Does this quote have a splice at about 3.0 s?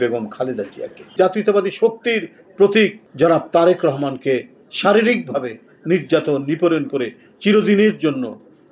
yes; 2 cuts; at 1.1 s, 3.0 s

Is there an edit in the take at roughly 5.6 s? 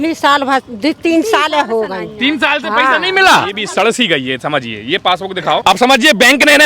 yes; 2 cuts; at 3.6 s, 5.6 s

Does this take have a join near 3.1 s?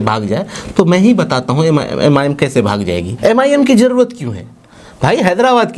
yes; 1 cut; at 3.1 s

